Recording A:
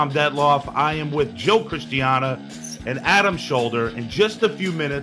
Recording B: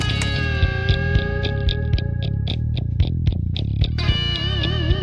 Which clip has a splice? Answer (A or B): A